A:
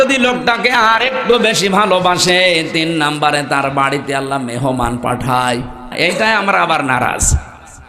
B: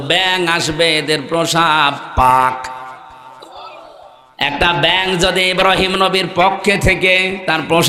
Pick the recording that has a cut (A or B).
A